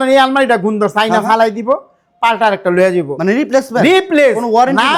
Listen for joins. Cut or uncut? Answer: uncut